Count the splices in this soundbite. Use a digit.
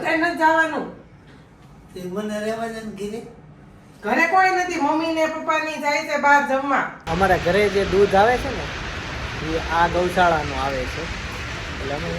1